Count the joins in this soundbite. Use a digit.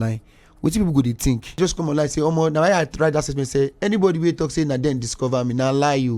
1